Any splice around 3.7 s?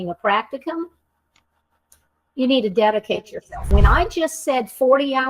yes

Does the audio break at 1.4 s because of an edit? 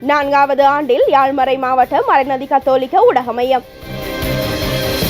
no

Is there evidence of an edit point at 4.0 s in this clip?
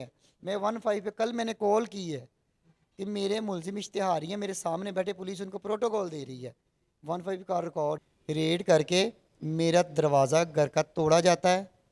no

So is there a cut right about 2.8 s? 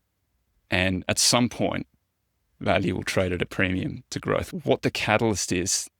no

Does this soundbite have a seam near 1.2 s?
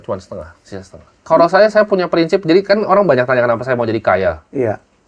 yes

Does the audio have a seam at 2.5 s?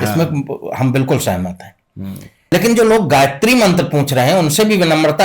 yes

